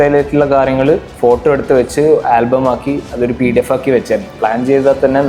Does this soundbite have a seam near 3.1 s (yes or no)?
no